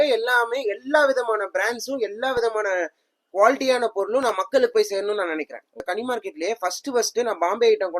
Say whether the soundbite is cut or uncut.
cut